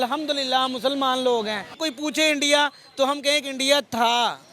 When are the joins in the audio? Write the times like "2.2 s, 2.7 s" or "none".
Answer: 1.7 s